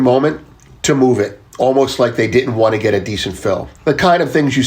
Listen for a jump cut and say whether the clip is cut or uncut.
cut